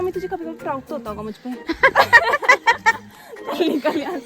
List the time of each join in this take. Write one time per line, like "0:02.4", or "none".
0:01.6